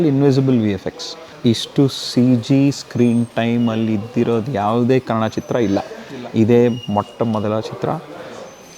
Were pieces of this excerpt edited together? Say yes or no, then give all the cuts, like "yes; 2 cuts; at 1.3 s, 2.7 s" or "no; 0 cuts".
yes; 1 cut; at 1.2 s